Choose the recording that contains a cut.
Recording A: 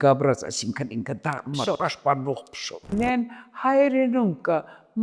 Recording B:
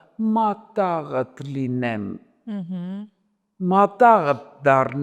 A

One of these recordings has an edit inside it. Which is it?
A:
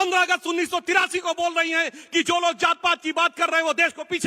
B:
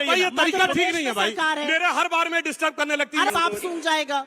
B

